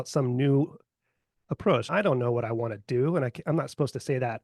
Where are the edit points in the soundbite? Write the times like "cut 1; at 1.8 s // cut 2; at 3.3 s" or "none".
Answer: cut 1; at 1.9 s